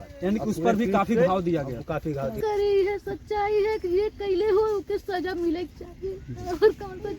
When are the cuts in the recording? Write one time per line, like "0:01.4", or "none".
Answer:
0:02.4